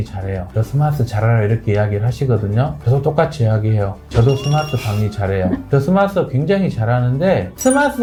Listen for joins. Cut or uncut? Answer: uncut